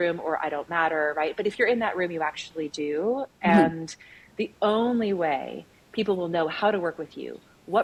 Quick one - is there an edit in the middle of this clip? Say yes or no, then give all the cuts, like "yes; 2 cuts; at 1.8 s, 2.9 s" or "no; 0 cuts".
no; 0 cuts